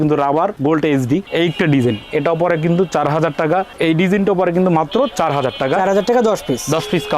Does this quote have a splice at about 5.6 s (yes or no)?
no